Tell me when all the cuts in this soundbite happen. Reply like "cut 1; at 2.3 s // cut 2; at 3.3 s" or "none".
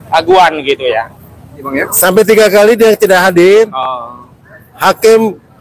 cut 1; at 1.7 s